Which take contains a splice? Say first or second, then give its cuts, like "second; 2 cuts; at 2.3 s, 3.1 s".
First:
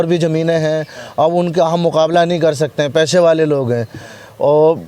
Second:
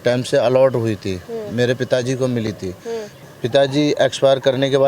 second; 1 cut; at 3.1 s